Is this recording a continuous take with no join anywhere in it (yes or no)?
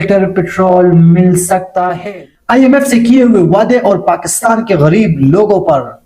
no